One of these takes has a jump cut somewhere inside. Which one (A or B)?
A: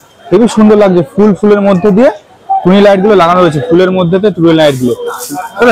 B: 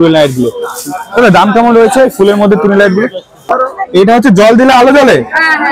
B